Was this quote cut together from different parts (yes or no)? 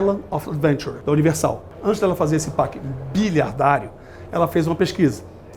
yes